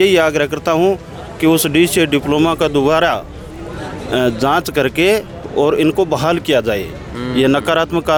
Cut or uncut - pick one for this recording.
uncut